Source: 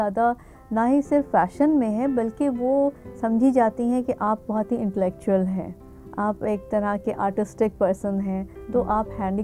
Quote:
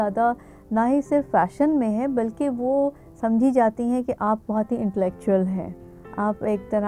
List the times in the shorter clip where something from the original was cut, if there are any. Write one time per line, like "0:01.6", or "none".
none